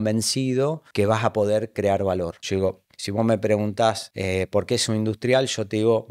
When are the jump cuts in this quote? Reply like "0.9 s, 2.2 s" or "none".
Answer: 0.8 s, 2.4 s, 4.1 s